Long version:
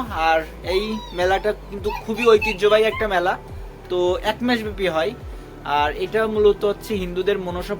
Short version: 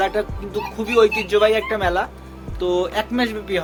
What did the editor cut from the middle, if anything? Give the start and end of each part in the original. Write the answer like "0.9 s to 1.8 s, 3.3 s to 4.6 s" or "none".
none